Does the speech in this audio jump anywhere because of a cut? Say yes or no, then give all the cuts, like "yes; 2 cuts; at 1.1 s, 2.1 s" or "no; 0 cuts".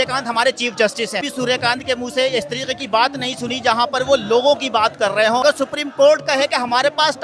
yes; 2 cuts; at 1.2 s, 5.4 s